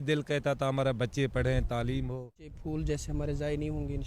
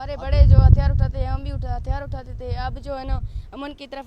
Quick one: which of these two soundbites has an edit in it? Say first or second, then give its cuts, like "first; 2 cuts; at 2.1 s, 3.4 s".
first; 1 cut; at 2.6 s